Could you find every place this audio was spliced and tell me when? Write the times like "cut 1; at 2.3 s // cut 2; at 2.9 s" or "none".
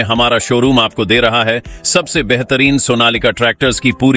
none